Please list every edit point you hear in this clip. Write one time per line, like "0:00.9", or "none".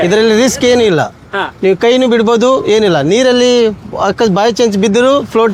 none